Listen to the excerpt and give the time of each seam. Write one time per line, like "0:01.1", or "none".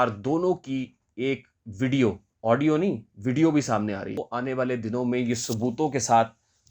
0:02.3
0:04.3